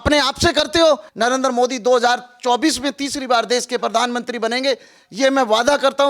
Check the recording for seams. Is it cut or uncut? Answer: cut